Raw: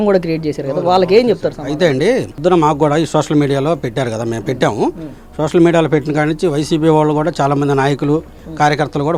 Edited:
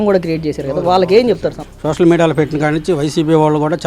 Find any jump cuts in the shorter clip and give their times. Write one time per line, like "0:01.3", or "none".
0:01.6